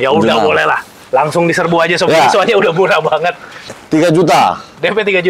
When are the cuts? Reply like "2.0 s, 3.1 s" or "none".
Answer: 3.8 s